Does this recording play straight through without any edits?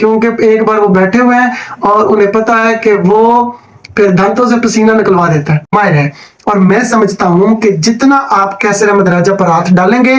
no; 1 cut; at 5.7 s

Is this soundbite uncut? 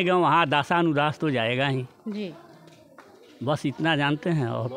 yes; 0 cuts

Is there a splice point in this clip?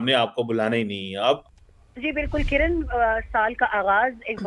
yes; 1 cut; at 1.4 s

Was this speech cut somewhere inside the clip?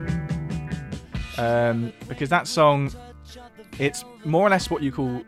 yes; 1 cut; at 1.3 s

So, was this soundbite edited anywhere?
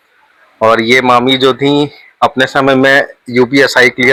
no; 0 cuts

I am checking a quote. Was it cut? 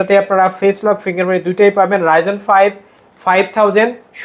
no; 0 cuts

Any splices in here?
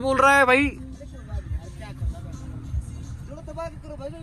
no; 0 cuts

